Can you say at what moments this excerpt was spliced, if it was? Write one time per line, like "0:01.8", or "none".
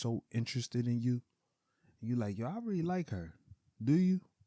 none